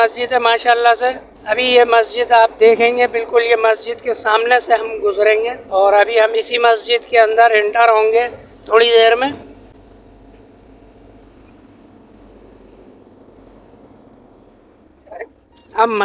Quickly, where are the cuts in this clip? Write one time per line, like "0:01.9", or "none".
none